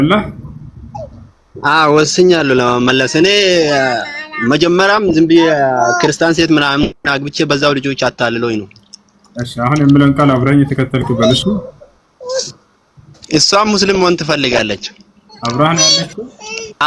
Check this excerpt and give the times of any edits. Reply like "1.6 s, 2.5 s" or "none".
none